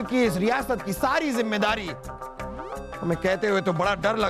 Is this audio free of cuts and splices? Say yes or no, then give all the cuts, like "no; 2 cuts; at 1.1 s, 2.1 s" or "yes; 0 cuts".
yes; 0 cuts